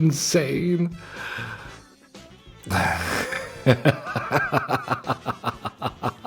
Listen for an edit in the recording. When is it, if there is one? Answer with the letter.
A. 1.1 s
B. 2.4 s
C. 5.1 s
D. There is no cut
B